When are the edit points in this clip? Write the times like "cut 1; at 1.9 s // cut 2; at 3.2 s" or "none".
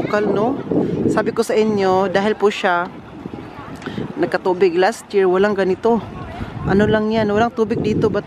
none